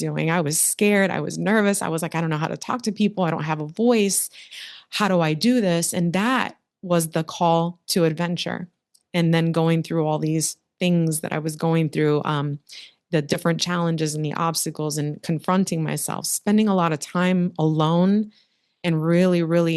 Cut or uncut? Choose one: uncut